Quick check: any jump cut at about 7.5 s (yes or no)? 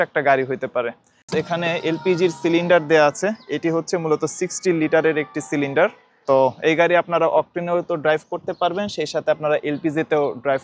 no